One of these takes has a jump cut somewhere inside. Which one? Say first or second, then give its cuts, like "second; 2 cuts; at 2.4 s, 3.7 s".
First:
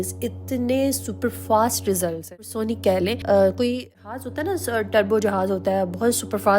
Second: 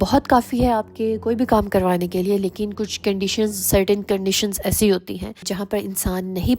first; 2 cuts; at 2.3 s, 3.8 s